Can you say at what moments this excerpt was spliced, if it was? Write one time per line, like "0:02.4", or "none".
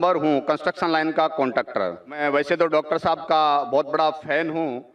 0:02.2